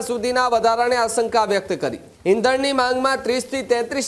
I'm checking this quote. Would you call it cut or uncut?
cut